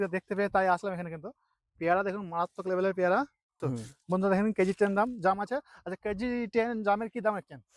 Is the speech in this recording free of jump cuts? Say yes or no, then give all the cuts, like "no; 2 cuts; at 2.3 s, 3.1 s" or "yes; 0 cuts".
no; 1 cut; at 3.6 s